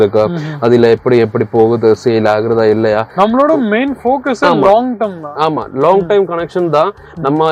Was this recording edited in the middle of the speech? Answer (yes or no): no